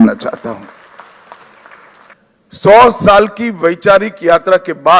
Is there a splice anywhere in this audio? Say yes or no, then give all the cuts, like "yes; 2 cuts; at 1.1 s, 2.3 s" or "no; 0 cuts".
yes; 1 cut; at 2.1 s